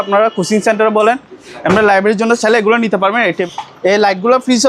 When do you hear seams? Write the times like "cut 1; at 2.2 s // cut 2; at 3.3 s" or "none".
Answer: cut 1; at 3.4 s